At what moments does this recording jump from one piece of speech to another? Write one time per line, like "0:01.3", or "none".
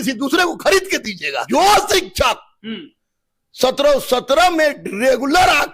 0:01.5